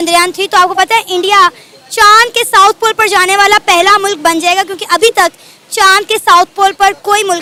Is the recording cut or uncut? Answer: uncut